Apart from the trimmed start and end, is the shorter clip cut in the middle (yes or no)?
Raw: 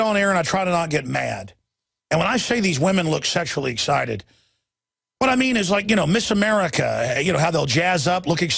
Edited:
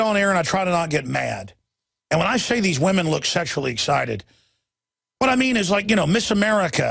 no